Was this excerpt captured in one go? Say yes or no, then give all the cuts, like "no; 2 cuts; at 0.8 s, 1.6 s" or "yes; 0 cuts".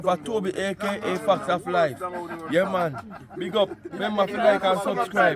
no; 1 cut; at 4.0 s